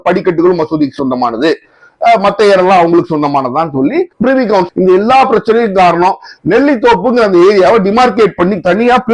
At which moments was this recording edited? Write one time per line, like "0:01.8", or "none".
0:04.7